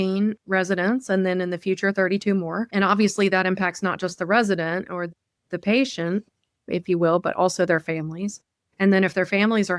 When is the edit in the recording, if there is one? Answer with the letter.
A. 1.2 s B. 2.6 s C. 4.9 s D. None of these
B